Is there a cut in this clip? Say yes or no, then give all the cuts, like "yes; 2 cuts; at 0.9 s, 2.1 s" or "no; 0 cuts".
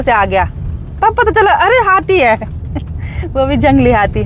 no; 0 cuts